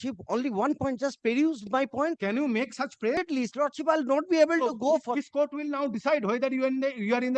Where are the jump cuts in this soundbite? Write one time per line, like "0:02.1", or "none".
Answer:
0:03.2